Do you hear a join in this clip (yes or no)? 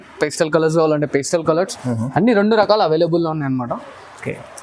no